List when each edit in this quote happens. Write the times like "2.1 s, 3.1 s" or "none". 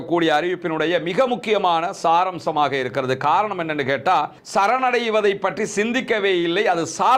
4.4 s

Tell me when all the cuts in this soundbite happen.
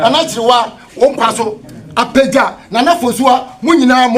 none

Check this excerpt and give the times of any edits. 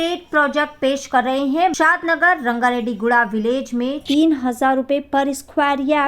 1.7 s

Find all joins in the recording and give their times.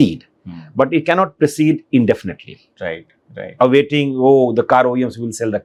none

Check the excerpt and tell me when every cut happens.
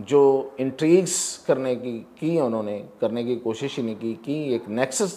none

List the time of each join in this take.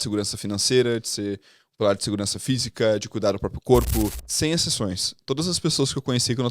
4.2 s

